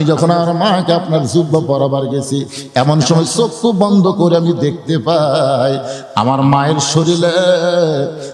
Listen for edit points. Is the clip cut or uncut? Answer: uncut